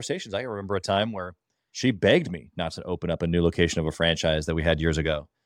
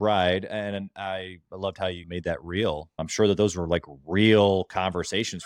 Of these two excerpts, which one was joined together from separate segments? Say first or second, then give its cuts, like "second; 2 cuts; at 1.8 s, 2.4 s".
second; 2 cuts; at 2.0 s, 3.0 s